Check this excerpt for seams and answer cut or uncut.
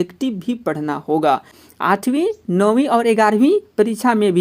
cut